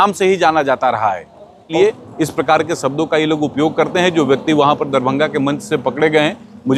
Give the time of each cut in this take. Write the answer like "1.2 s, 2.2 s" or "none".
1.7 s